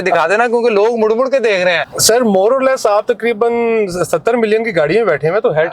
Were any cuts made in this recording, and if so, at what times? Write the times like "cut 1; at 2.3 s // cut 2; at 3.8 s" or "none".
cut 1; at 1.9 s